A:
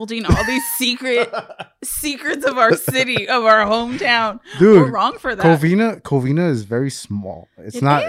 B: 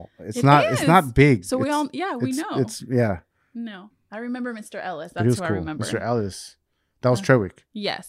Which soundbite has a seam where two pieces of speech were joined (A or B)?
B